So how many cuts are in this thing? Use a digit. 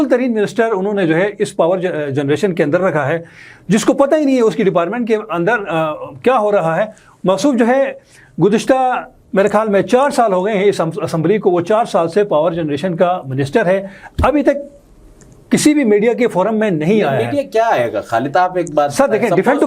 0